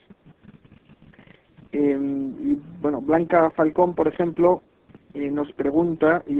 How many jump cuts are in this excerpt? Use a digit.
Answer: 0